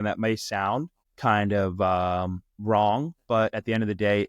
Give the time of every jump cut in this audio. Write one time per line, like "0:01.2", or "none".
0:01.0